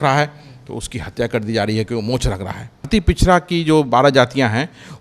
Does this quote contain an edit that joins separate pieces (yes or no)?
yes